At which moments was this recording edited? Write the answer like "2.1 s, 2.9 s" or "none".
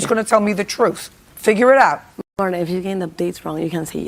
none